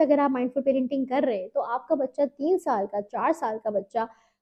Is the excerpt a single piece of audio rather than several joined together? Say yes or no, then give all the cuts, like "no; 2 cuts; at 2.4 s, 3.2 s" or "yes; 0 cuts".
yes; 0 cuts